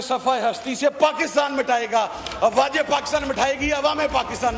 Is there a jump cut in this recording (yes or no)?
no